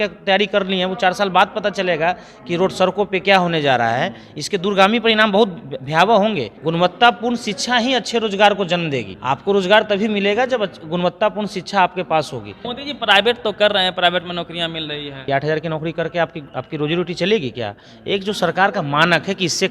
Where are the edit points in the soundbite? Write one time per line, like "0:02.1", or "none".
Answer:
0:06.5
0:09.1
0:12.7
0:15.3